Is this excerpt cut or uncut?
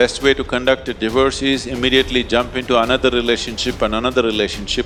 uncut